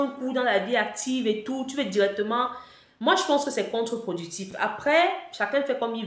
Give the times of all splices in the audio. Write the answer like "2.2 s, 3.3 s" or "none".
none